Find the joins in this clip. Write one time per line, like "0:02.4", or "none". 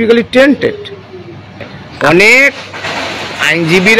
0:01.8

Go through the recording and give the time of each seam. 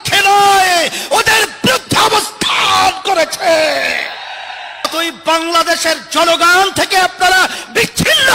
0:04.9

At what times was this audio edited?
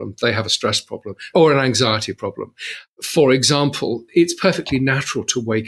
0:01.3
0:04.0

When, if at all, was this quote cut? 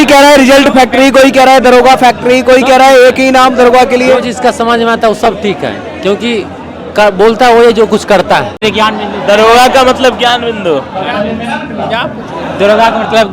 0:08.6

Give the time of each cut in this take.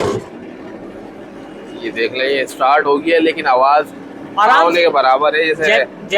none

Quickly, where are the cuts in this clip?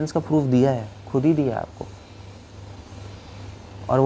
none

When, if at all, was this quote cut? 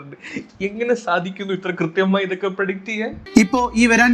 0:03.2

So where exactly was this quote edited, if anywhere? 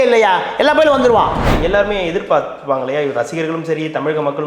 0:01.5

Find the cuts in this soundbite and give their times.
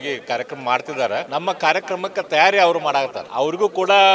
0:01.3
0:03.2

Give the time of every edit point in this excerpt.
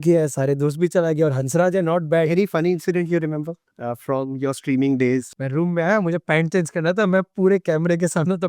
0:02.3
0:05.3

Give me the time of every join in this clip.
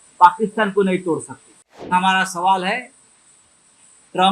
0:01.9

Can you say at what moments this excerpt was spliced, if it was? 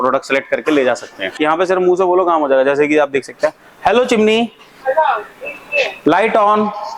0:01.3

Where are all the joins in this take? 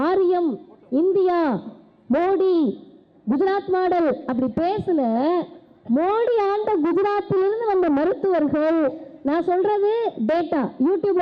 none

